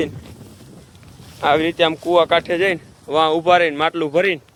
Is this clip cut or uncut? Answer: uncut